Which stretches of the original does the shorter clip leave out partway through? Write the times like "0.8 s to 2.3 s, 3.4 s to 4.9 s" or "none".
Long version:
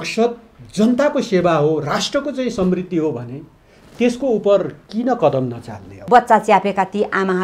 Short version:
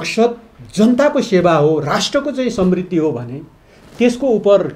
none